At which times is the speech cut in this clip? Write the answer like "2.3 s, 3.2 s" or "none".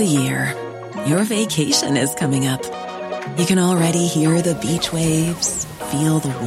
none

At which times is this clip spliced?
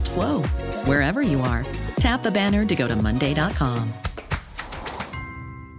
none

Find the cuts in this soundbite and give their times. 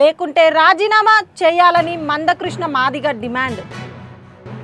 3.6 s

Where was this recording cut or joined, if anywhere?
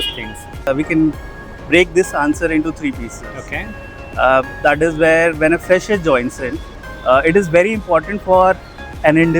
none

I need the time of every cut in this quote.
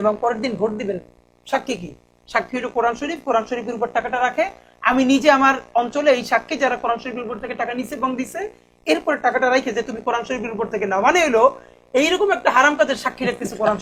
none

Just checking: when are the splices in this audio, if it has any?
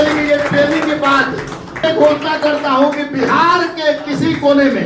1.8 s

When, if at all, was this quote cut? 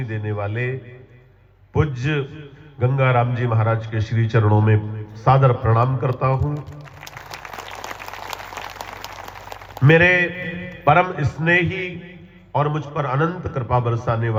none

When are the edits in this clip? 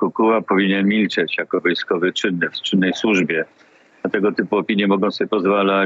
none

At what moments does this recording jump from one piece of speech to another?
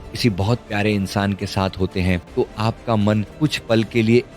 2.3 s, 3.3 s

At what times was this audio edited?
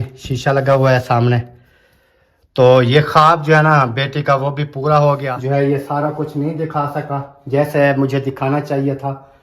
5.3 s

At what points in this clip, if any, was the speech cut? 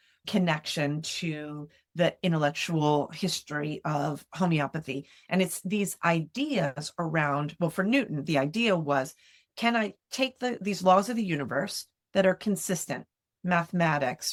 none

